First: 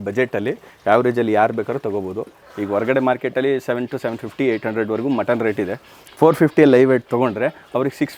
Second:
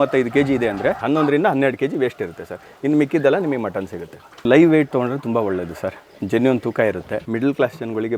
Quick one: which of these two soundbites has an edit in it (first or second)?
second